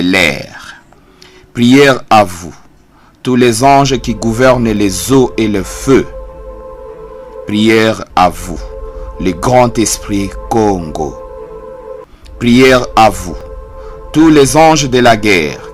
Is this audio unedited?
no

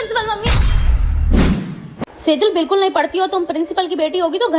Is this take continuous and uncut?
yes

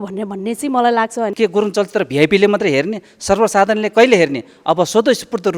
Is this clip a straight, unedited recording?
no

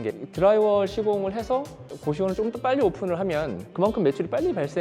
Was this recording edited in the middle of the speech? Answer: yes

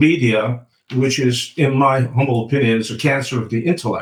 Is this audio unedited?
yes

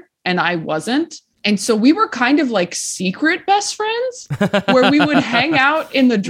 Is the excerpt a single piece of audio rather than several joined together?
no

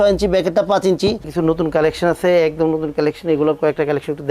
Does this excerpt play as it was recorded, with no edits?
no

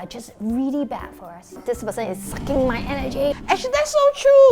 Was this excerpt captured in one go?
no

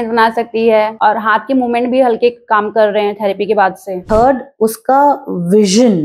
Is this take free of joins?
no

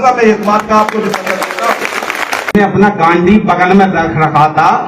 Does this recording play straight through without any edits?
no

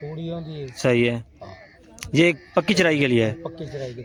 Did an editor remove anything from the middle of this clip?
no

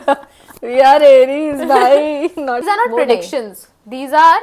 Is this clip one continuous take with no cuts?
no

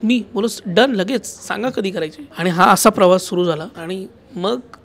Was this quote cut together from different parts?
yes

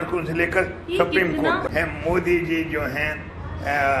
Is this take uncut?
no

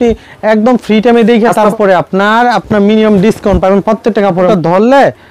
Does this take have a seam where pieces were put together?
yes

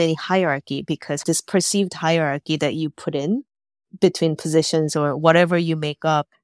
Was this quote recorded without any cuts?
no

